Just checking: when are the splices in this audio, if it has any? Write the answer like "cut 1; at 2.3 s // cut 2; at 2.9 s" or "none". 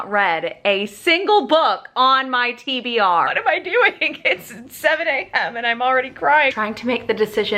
cut 1; at 3.3 s // cut 2; at 6.5 s